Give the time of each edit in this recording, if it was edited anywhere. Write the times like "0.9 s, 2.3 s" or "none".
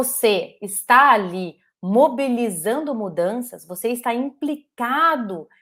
none